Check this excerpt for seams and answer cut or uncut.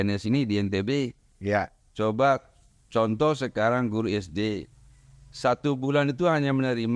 uncut